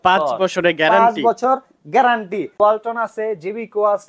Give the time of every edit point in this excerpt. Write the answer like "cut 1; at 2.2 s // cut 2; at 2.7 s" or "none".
cut 1; at 2.6 s